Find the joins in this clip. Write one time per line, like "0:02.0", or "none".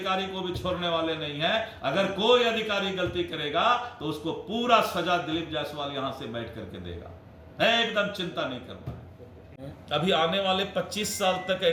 none